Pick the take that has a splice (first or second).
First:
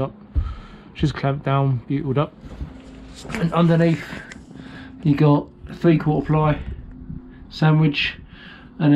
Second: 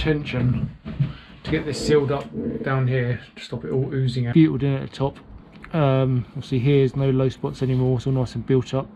second